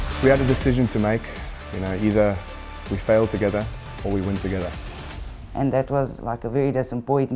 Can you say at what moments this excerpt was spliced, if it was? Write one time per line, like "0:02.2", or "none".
0:04.9
0:06.2